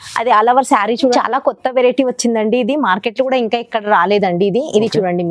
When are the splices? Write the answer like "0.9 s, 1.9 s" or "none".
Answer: 1.1 s